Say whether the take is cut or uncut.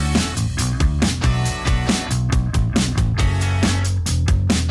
cut